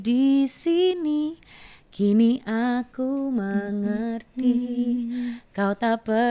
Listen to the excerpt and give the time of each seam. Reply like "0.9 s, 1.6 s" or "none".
none